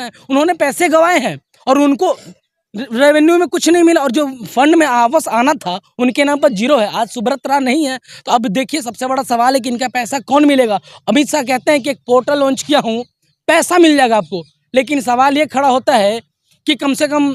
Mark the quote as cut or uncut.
uncut